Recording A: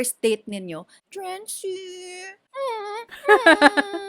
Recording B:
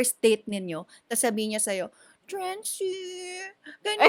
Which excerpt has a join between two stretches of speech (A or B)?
A